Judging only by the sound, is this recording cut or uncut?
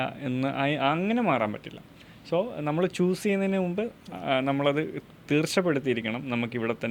uncut